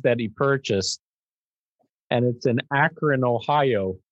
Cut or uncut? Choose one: uncut